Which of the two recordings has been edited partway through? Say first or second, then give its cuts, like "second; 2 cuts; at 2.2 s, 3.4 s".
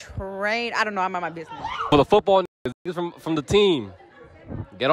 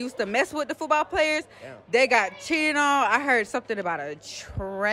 first; 1 cut; at 1.9 s